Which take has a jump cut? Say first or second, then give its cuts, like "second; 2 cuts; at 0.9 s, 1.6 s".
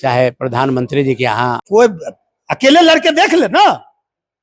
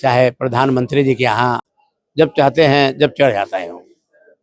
first; 1 cut; at 1.6 s